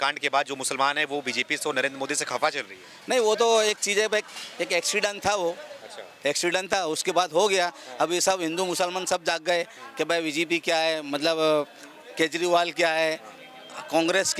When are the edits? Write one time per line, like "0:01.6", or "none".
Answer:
none